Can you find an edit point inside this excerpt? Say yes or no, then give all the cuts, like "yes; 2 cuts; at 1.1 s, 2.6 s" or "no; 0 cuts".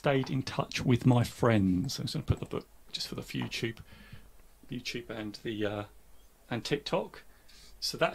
no; 0 cuts